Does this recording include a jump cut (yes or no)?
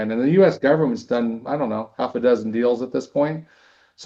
no